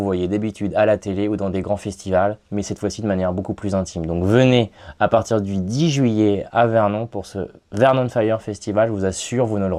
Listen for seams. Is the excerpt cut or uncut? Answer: uncut